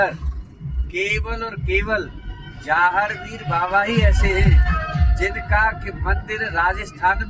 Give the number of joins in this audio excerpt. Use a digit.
0